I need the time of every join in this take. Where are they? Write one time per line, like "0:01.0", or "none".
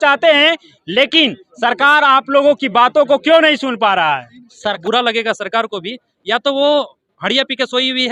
0:04.8